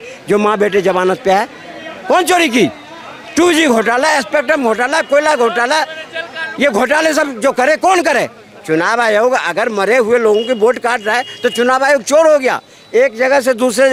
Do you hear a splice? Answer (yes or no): no